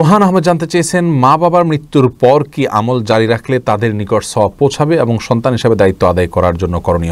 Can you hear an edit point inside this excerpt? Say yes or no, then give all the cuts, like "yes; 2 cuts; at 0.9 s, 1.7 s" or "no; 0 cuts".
no; 0 cuts